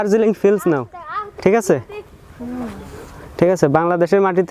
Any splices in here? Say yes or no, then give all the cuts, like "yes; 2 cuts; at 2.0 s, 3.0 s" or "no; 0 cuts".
no; 0 cuts